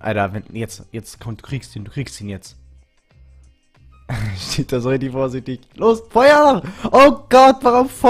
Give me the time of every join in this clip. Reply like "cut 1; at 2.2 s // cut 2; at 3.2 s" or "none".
none